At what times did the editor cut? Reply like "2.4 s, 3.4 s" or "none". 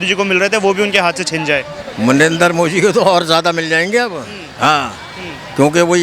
none